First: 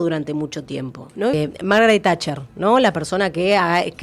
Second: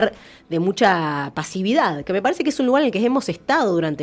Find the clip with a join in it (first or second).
first